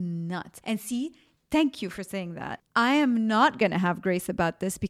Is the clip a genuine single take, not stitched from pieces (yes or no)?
no